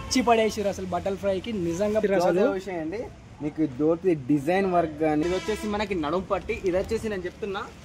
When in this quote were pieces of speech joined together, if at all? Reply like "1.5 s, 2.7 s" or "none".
2.0 s, 5.2 s